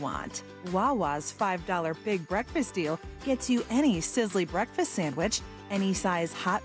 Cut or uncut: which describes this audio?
uncut